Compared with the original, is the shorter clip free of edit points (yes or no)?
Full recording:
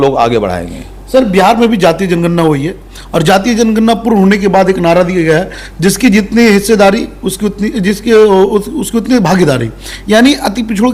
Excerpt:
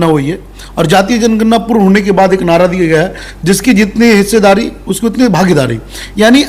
no